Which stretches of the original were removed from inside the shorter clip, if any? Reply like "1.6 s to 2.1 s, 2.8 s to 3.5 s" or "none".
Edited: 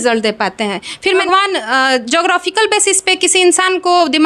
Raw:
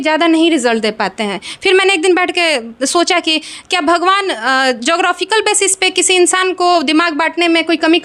1.8 s to 4.0 s